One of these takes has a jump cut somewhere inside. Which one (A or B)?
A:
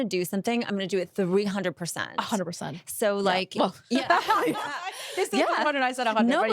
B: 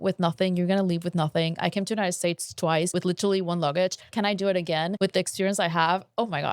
B